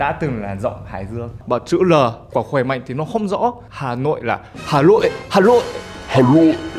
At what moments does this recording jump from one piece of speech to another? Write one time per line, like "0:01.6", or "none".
0:01.3
0:03.7